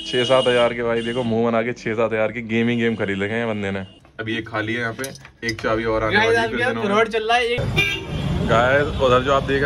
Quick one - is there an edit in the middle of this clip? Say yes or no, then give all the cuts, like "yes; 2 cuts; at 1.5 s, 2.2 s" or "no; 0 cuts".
yes; 2 cuts; at 3.9 s, 7.6 s